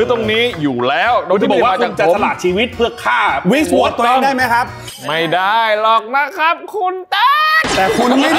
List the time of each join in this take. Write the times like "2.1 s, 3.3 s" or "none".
4.9 s